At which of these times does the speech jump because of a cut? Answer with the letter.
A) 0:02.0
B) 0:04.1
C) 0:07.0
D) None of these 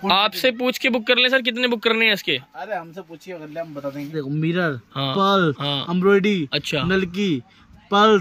B